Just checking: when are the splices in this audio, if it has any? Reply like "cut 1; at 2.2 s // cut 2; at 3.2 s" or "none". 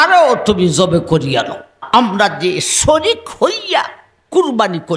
cut 1; at 1.8 s